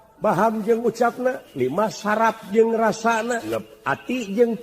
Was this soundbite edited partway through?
yes; 2 cuts; at 1.5 s, 3.5 s

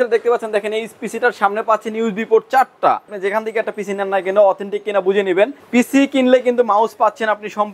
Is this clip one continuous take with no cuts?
no; 2 cuts; at 3.2 s, 5.5 s

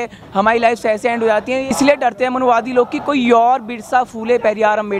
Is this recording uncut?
no; 1 cut; at 1.7 s

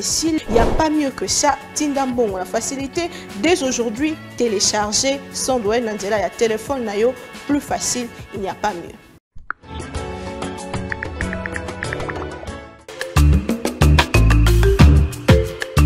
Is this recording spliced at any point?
yes; 1 cut; at 12.9 s

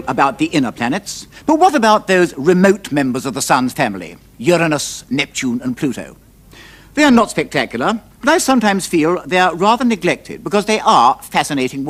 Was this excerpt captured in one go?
yes; 0 cuts

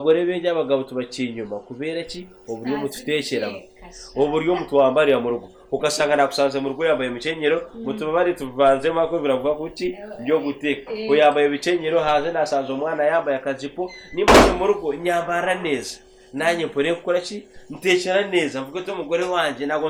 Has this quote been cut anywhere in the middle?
no; 0 cuts

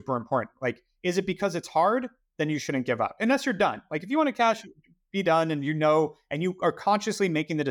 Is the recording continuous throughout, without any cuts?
yes; 0 cuts

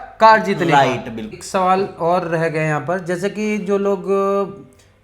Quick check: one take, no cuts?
no; 1 cut; at 1.3 s

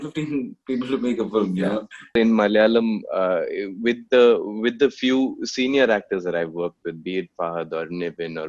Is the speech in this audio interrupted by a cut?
yes; 1 cut; at 2.1 s

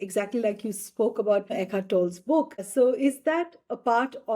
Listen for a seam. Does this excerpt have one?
yes; 2 cuts; at 1.5 s, 2.6 s

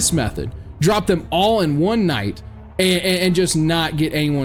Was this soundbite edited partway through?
no; 0 cuts

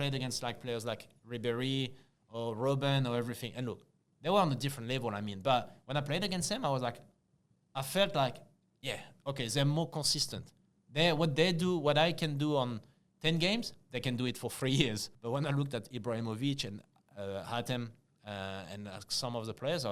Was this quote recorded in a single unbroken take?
no; 1 cut; at 15.1 s

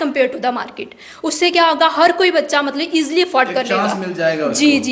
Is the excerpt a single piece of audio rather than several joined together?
yes; 0 cuts

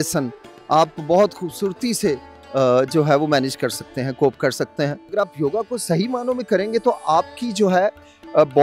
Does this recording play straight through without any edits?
no; 1 cut; at 5.1 s

